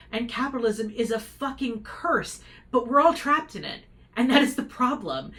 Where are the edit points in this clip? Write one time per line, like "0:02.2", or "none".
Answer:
none